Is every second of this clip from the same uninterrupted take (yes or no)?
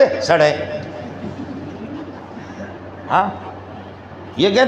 yes